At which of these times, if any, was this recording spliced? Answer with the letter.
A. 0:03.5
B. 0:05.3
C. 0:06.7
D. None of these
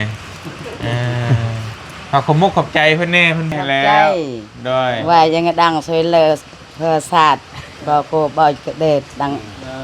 A